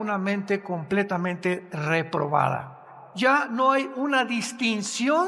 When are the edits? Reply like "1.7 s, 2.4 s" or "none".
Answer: 3.1 s